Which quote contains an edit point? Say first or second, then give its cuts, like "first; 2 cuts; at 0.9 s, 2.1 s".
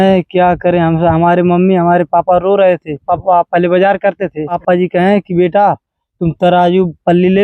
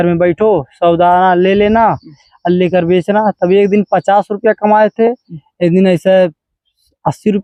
first; 2 cuts; at 3.0 s, 4.6 s